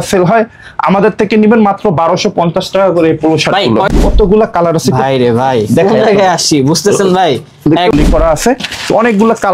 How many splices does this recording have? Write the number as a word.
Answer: two